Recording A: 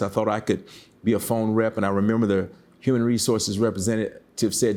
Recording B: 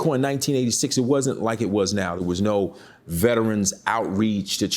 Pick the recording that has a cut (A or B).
B